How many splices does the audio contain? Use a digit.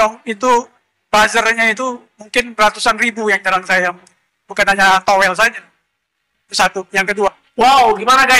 0